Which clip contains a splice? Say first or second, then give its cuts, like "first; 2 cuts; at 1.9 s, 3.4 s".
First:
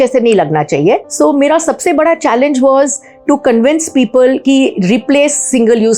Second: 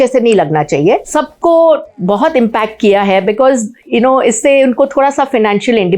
second; 1 cut; at 1.1 s